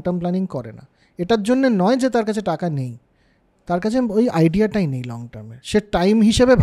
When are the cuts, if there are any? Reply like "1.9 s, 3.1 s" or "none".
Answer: none